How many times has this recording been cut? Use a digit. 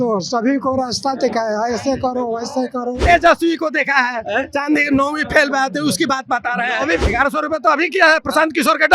2